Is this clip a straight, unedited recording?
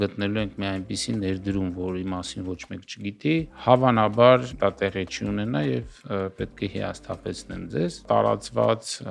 no; 2 cuts; at 4.5 s, 8.0 s

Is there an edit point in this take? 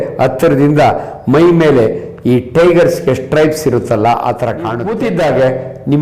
yes; 1 cut; at 4.9 s

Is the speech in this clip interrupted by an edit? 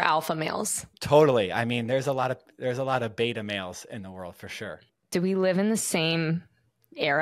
yes; 1 cut; at 4.9 s

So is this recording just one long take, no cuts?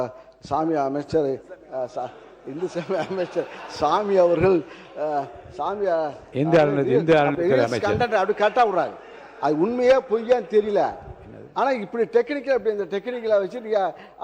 yes; 0 cuts

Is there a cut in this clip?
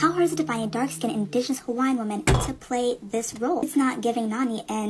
no; 0 cuts

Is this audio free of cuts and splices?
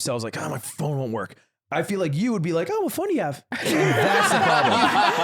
no; 1 cut; at 3.5 s

